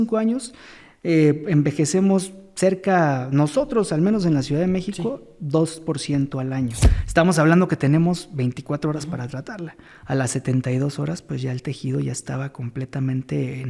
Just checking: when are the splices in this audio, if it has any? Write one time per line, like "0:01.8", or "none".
0:06.9